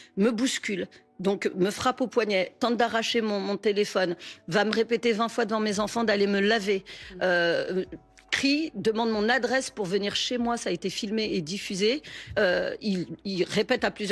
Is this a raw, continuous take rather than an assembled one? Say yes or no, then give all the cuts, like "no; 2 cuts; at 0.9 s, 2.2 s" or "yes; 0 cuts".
yes; 0 cuts